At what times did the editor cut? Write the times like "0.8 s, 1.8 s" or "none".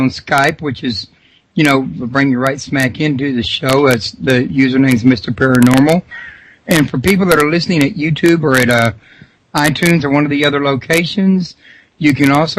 none

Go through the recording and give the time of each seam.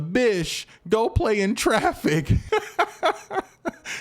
2.4 s

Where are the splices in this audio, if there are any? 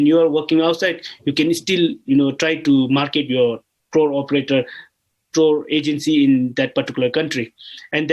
none

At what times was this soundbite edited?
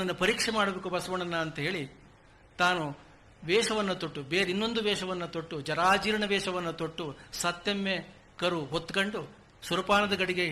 none

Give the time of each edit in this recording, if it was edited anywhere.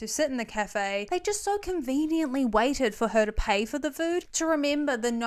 4.3 s

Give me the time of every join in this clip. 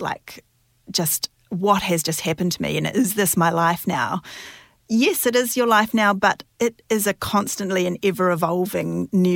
none

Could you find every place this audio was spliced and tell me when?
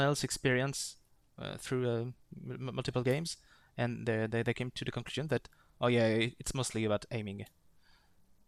none

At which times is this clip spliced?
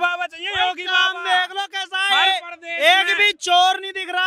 none

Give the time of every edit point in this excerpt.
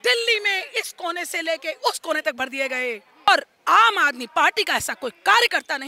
3.3 s

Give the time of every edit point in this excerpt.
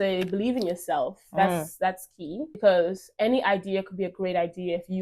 2.5 s

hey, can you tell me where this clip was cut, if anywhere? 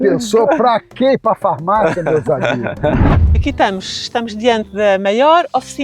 3.3 s

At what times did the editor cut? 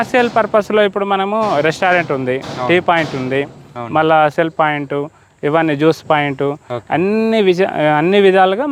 none

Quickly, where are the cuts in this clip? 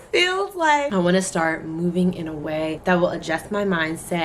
0.9 s, 2.8 s

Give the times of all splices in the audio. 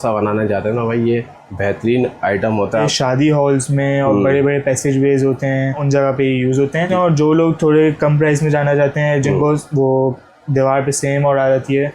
2.9 s, 5.8 s, 6.9 s

